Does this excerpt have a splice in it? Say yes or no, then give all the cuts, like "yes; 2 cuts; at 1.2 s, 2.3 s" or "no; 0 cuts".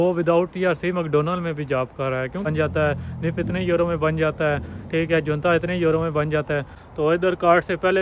yes; 2 cuts; at 2.5 s, 6.8 s